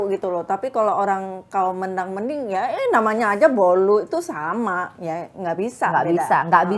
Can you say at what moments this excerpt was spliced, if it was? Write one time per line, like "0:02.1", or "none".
none

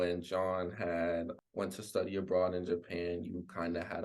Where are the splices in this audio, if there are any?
0:01.4

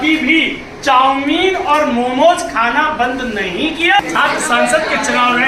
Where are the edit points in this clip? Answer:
0:04.0

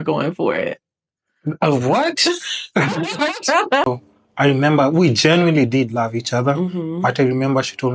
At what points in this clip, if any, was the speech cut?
0:03.9

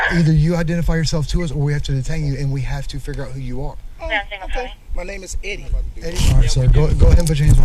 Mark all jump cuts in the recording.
0:05.9

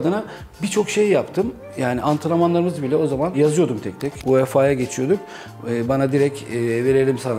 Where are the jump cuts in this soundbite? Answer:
0:04.1

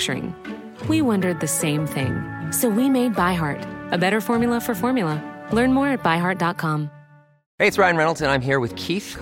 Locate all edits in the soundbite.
0:07.4

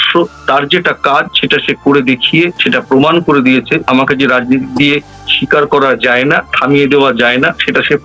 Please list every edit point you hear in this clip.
0:02.6
0:03.8

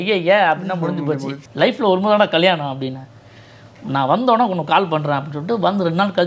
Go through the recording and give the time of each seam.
0:01.4

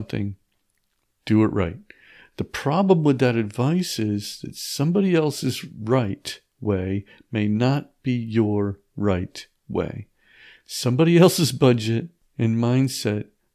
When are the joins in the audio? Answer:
0:12.2

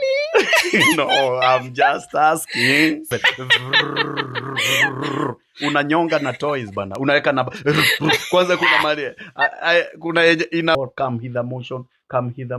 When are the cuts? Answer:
0:03.1
0:10.7

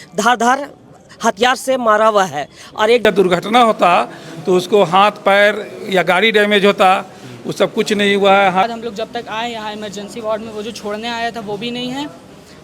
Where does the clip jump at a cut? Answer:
0:03.0
0:08.6

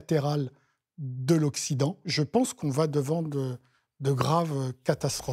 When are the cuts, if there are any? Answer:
0:02.1

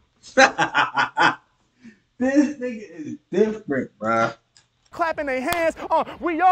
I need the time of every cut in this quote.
0:04.9

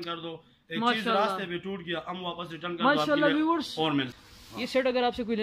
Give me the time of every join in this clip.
0:04.2

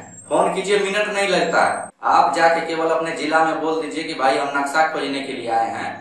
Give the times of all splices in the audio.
0:01.9

